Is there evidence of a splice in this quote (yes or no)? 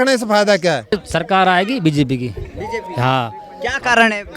yes